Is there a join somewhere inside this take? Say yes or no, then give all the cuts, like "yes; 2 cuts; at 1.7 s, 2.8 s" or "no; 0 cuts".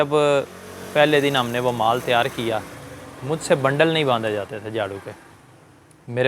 no; 0 cuts